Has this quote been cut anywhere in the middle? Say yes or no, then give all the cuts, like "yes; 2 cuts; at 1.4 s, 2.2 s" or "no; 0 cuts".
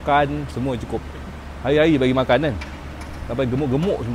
no; 0 cuts